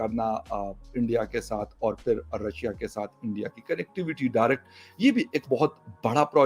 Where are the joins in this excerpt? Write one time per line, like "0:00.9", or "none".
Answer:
none

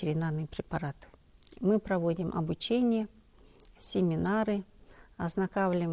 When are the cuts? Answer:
none

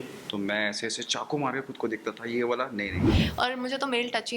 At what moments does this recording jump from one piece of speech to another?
0:03.2

